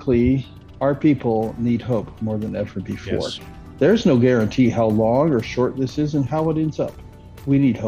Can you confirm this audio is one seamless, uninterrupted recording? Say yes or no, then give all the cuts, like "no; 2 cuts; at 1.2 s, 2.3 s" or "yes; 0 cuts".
no; 1 cut; at 6.3 s